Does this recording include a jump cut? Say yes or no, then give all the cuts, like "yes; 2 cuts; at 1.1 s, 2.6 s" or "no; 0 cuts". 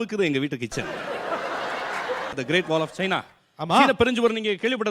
yes; 1 cut; at 2.3 s